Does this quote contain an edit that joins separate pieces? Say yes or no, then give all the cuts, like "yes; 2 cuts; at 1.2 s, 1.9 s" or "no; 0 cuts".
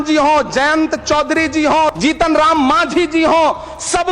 yes; 1 cut; at 1.9 s